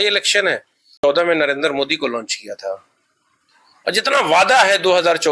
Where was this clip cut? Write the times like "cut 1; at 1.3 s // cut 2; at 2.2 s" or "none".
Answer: cut 1; at 1.0 s